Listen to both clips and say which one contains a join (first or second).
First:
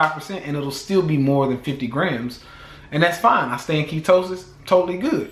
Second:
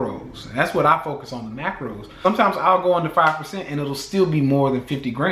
second